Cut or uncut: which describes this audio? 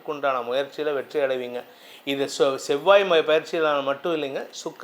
uncut